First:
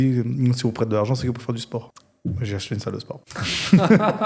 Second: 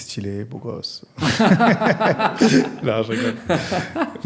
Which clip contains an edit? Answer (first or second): first